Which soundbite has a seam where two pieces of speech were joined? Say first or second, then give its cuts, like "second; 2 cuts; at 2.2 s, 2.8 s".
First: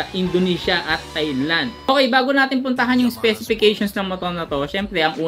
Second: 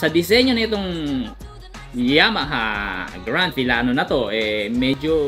first; 1 cut; at 1.9 s